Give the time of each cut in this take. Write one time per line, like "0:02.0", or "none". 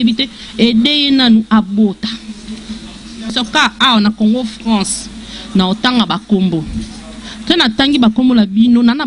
0:03.3

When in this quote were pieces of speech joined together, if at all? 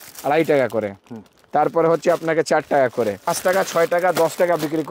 0:03.4

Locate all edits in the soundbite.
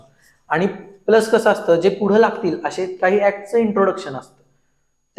none

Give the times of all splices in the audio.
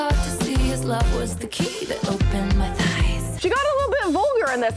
0:03.3

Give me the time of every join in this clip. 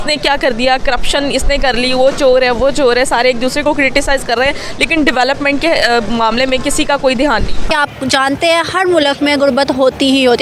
0:07.6

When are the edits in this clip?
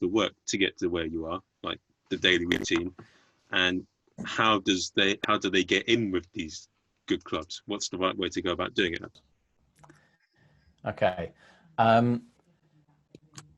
0:09.2

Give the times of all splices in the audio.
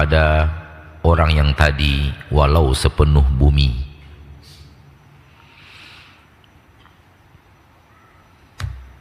none

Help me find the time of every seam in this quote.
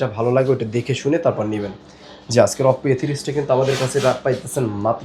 none

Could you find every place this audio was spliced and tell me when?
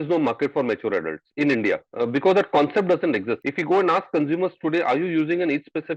0:01.9
0:03.5

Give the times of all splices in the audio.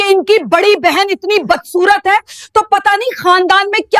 none

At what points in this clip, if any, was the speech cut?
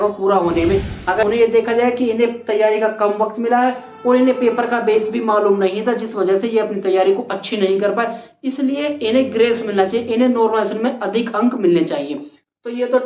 0:01.2

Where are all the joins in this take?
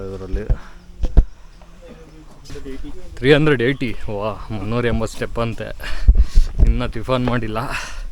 0:02.5

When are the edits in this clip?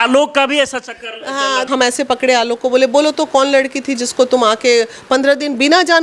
0:01.7

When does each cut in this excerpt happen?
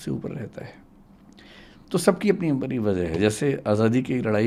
none

